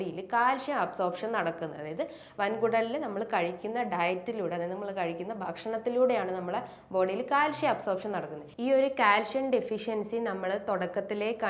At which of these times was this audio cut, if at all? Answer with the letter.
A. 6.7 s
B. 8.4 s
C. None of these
B